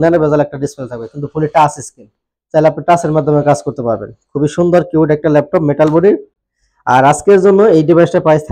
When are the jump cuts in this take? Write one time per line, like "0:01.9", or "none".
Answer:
none